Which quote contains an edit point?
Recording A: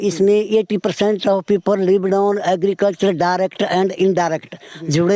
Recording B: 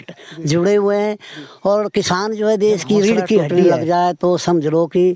B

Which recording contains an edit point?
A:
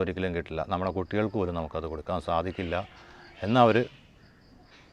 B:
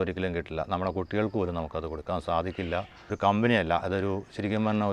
B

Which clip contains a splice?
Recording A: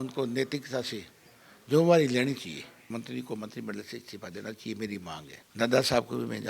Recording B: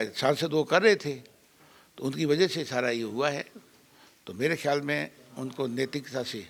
A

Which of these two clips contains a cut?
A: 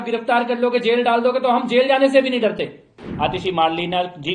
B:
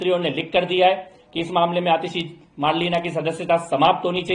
A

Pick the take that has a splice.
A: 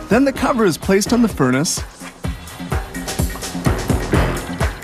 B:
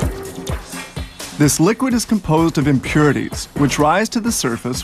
B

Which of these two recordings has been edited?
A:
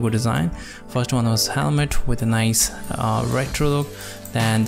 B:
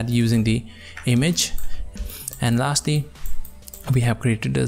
B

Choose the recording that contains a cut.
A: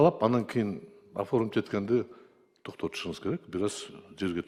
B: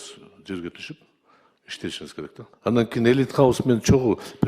B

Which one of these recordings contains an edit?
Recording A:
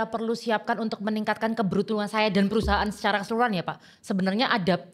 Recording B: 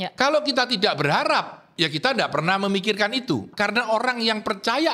B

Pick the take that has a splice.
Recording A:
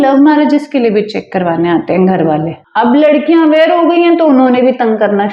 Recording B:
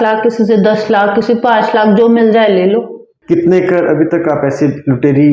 A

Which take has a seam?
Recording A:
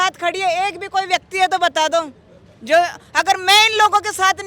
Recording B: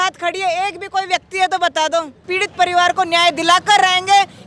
B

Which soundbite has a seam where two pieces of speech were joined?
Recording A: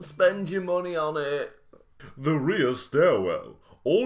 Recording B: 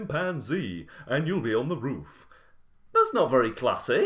A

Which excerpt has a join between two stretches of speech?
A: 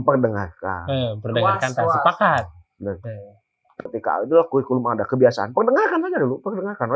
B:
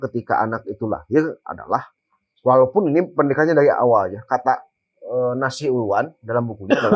A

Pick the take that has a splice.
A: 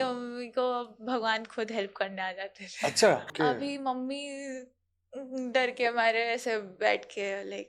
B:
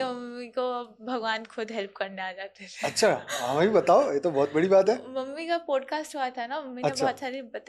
A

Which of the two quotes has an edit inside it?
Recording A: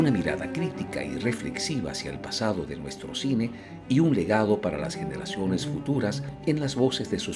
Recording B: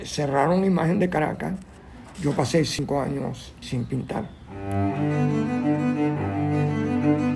B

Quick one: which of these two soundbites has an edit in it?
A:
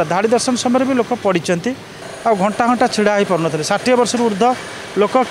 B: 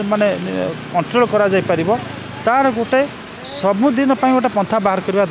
A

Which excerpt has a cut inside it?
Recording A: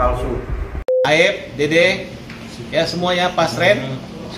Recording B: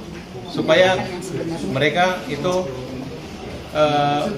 A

